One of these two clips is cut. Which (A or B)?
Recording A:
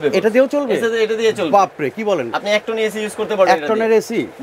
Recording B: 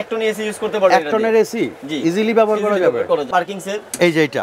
B